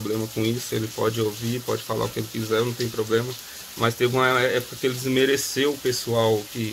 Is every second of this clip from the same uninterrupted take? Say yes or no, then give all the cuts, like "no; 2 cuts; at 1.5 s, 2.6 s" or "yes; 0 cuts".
yes; 0 cuts